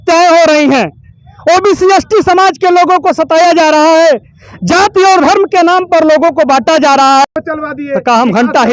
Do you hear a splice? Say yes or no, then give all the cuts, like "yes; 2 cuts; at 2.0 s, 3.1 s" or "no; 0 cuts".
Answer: yes; 1 cut; at 7.2 s